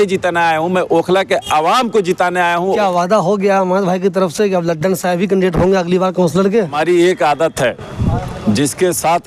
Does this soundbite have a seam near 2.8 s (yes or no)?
yes